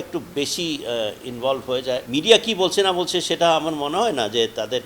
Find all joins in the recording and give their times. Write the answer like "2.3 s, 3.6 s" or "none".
2.1 s